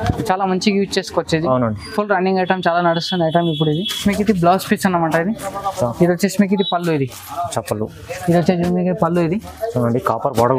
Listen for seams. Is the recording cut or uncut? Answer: cut